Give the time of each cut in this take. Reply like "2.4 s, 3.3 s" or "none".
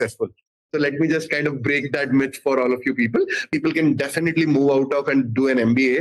3.5 s